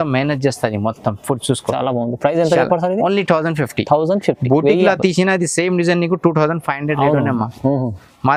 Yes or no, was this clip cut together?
no